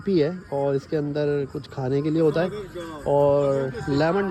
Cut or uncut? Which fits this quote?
uncut